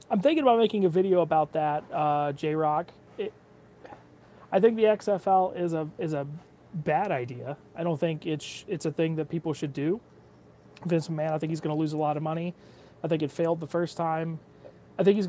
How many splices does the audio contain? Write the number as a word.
one